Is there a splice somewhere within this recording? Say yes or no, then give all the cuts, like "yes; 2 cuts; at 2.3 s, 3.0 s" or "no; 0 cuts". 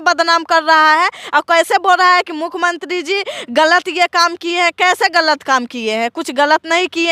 no; 0 cuts